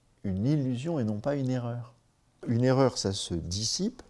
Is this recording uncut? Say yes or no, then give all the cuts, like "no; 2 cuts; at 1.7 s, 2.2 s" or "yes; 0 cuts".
no; 1 cut; at 2.4 s